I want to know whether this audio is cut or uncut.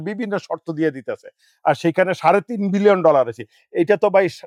uncut